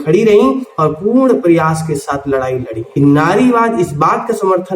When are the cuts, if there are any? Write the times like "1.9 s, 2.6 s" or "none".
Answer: 2.9 s